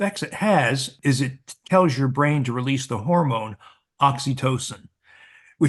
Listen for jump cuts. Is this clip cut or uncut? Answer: cut